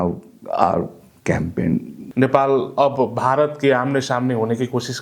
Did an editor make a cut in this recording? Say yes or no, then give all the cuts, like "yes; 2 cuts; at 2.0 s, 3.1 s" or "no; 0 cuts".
yes; 1 cut; at 2.0 s